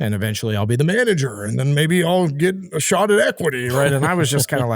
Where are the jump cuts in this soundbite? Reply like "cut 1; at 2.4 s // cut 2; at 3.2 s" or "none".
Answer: none